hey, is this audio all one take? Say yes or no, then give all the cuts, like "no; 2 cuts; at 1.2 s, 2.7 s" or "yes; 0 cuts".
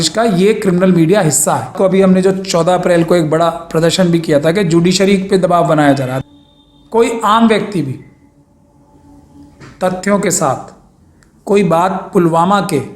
no; 2 cuts; at 1.7 s, 6.1 s